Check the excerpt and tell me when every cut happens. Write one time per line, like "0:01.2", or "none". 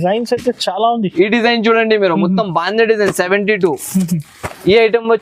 none